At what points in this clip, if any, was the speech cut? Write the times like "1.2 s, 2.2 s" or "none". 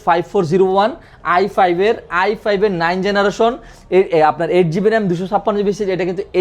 none